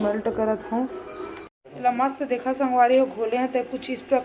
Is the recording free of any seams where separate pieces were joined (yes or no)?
no